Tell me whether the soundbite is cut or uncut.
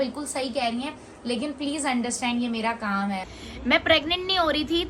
cut